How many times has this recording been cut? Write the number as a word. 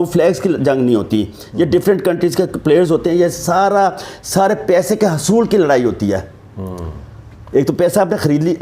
zero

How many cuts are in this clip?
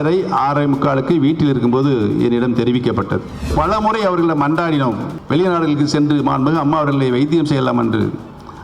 two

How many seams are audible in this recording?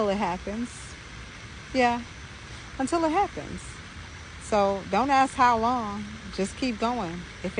zero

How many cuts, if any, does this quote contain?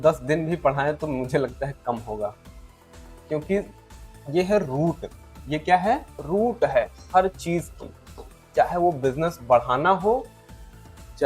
one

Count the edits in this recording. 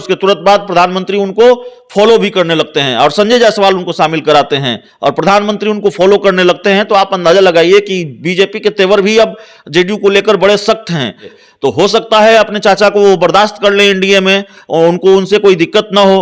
one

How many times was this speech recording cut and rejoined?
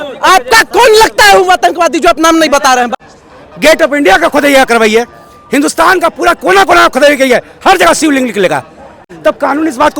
two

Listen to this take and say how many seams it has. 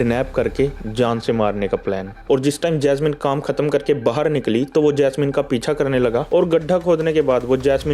two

